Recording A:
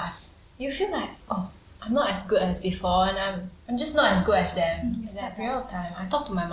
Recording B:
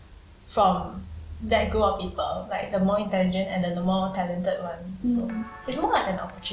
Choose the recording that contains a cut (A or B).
A